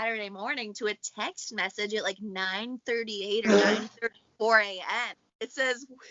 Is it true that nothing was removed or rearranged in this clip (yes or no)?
no